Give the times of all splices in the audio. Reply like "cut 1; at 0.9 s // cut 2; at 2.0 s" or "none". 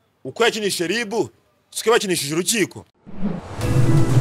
cut 1; at 2.9 s